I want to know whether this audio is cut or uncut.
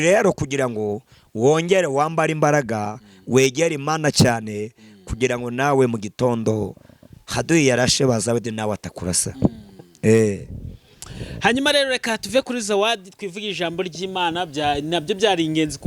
uncut